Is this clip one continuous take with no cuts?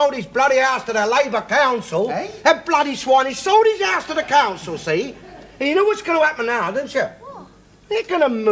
yes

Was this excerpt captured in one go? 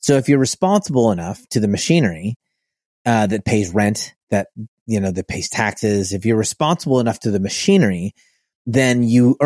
yes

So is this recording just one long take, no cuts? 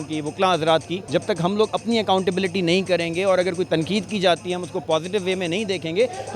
no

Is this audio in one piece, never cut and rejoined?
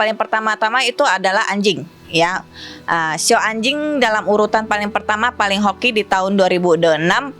yes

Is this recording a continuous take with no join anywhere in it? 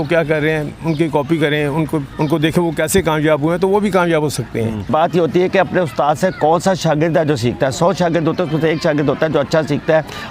no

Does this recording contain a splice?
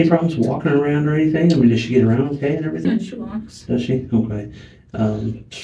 yes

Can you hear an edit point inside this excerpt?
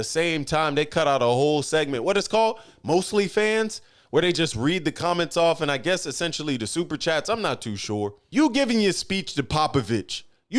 yes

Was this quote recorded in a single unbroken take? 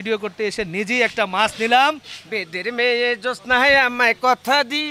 no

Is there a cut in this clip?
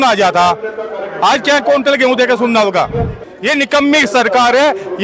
yes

